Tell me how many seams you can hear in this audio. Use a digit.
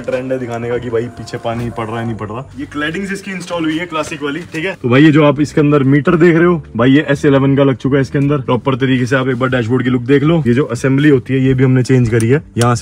4